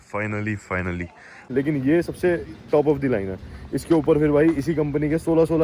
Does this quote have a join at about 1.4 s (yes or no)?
yes